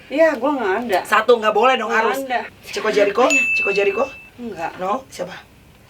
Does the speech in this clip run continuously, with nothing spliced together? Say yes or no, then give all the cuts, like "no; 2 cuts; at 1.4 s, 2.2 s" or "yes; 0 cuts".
no; 1 cut; at 2.5 s